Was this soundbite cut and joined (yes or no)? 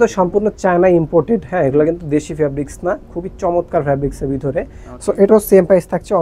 no